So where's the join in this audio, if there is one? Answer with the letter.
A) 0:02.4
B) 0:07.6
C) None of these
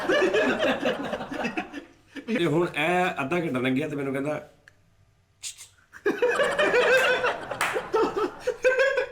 A